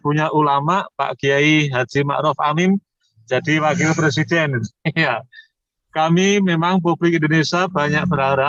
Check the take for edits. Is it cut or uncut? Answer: uncut